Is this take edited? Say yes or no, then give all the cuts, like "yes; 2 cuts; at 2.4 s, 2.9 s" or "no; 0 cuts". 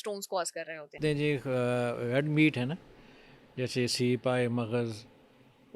yes; 1 cut; at 0.9 s